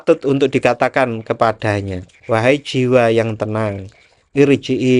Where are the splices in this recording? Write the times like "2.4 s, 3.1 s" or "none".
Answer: 2.2 s